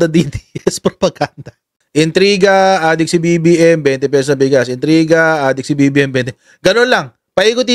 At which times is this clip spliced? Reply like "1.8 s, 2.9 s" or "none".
none